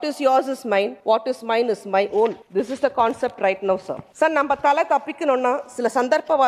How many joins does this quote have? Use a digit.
3